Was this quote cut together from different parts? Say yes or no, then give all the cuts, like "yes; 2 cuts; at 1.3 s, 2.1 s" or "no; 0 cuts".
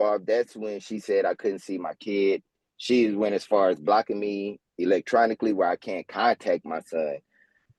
no; 0 cuts